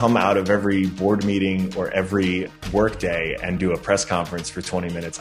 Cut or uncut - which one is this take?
cut